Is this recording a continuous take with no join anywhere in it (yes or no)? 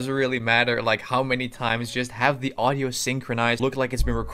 no